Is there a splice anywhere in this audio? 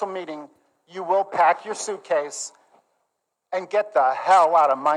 no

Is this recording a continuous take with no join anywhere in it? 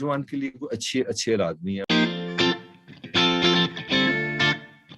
no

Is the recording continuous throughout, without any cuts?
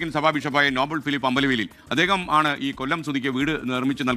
yes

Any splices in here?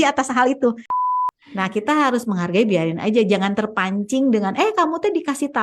yes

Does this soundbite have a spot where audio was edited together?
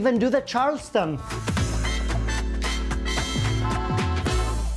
yes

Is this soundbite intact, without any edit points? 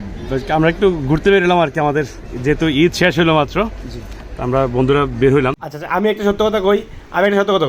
no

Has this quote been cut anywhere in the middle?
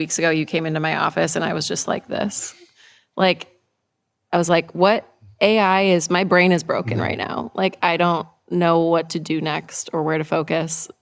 no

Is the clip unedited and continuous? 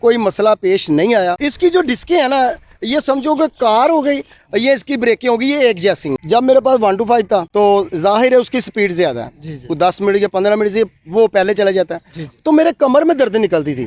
no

